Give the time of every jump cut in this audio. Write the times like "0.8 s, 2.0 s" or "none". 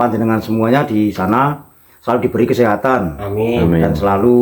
none

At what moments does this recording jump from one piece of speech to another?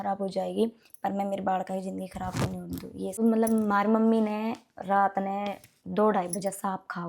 3.1 s

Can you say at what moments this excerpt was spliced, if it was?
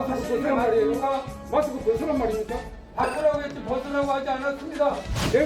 1.3 s

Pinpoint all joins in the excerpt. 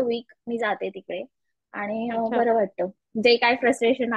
none

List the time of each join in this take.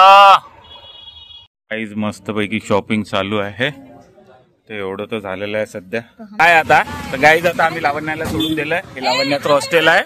1.5 s, 6.4 s

